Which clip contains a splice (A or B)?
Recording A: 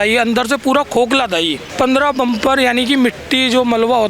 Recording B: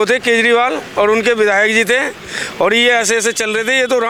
A